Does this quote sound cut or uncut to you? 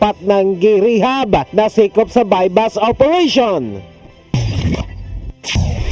cut